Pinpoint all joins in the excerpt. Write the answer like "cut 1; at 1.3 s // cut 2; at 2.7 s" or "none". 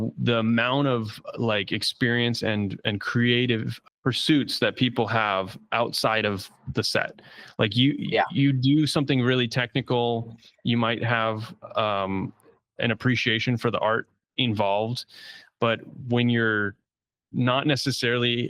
cut 1; at 3.7 s